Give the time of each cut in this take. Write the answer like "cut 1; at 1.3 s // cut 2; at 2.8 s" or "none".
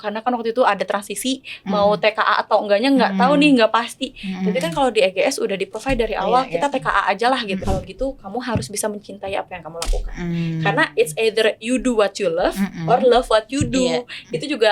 cut 1; at 7.6 s